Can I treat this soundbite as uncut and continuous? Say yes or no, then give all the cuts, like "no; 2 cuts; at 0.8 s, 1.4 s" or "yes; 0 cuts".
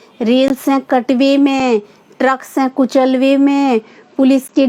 yes; 0 cuts